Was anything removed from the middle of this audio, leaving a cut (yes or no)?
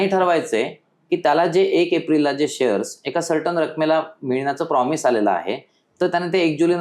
no